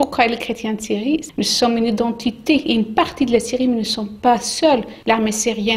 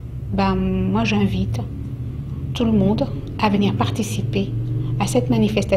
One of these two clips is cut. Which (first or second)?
first